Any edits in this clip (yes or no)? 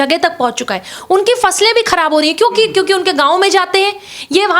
yes